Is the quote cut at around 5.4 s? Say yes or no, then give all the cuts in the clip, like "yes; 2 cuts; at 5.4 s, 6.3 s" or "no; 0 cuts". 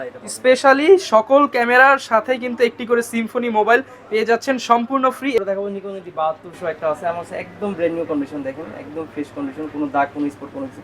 yes; 1 cut; at 5.4 s